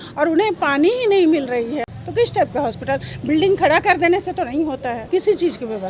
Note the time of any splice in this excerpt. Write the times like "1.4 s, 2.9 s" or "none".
1.9 s, 5.0 s